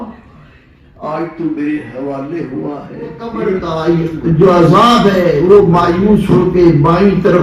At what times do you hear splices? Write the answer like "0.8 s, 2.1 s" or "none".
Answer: 3.5 s

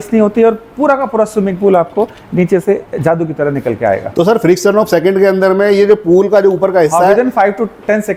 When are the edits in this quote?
none

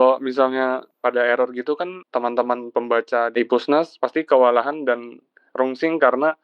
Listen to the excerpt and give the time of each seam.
0.9 s, 2.0 s, 3.8 s

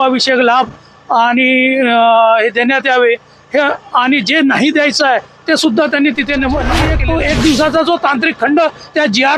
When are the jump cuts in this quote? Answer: 6.9 s

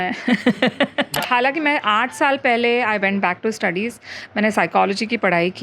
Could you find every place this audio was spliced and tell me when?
1.1 s

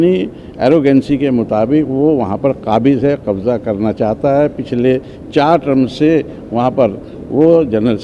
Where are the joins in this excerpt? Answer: none

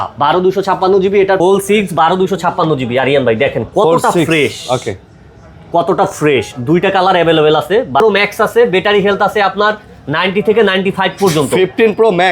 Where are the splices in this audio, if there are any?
1.4 s, 8.0 s

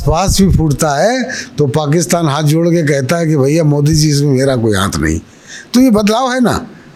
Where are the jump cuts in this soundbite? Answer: none

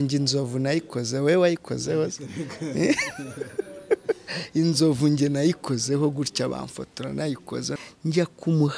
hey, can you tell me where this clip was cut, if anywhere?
7.7 s

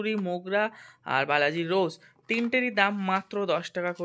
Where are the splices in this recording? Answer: none

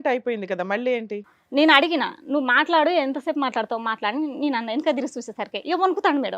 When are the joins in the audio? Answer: 1.3 s

